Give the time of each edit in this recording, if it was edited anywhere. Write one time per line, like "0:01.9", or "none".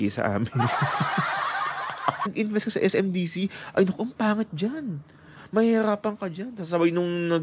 0:02.3